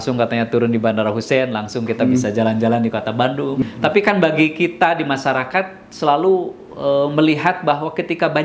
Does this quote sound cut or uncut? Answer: cut